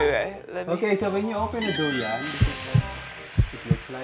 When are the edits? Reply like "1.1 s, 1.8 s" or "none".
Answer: none